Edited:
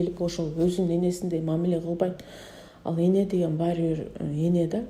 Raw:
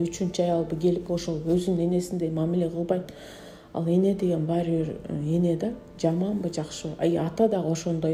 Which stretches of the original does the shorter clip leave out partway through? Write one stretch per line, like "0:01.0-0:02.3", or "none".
none